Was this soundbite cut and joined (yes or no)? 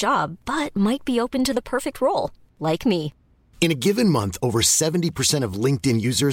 no